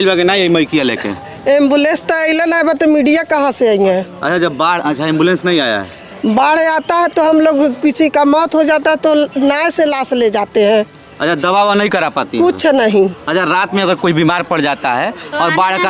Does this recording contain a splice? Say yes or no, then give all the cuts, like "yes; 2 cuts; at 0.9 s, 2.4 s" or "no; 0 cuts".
no; 0 cuts